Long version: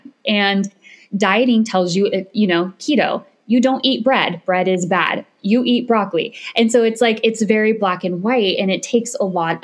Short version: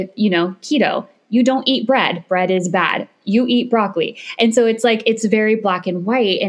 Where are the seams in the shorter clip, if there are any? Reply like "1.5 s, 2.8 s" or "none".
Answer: none